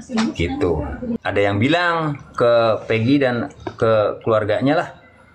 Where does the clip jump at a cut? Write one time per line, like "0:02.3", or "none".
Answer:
0:01.2